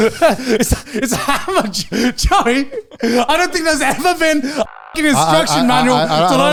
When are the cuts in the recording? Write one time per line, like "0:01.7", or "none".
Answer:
none